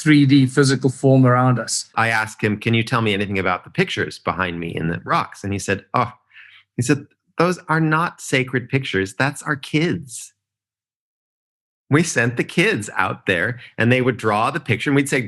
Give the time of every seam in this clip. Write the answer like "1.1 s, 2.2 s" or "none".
1.9 s